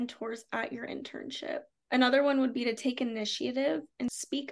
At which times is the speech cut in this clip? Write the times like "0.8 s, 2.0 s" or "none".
1.8 s